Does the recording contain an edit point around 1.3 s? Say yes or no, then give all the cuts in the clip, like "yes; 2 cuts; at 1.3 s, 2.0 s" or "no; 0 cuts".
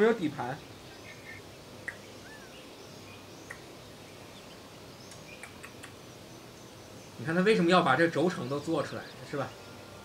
yes; 1 cut; at 1.3 s